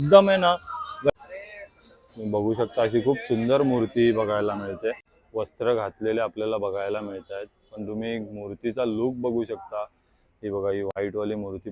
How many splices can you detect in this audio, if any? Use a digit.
2